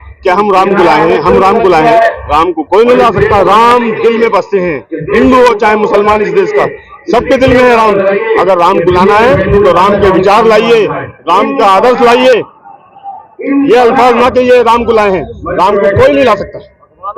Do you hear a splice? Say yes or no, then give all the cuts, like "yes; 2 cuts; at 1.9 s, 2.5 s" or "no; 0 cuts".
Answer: no; 0 cuts